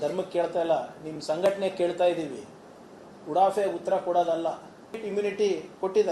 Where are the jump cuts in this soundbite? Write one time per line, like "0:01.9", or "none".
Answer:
0:05.0